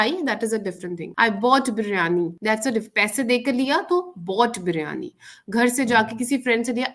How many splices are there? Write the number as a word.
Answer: two